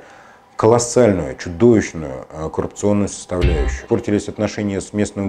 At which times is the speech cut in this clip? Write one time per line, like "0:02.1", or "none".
0:03.8